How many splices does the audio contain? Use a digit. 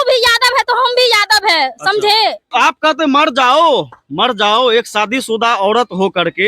1